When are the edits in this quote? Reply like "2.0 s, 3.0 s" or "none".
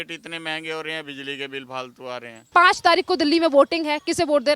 2.5 s